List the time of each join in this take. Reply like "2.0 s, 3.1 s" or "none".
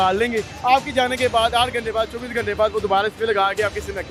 none